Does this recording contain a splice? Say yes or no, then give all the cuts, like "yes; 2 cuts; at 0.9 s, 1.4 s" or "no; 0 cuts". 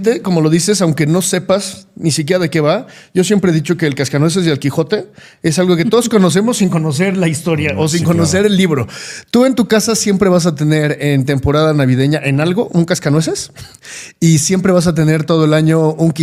no; 0 cuts